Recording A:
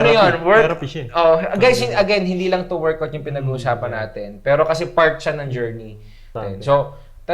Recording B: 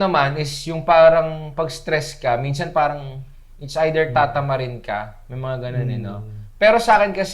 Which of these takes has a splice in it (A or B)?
A